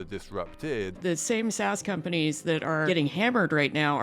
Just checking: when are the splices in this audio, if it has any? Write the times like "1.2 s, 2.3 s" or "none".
1.0 s, 2.8 s